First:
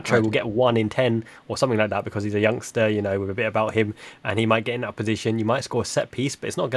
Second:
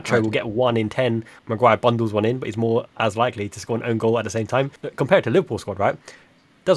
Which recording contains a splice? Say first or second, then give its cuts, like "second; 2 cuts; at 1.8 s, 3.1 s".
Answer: second; 2 cuts; at 1.4 s, 4.8 s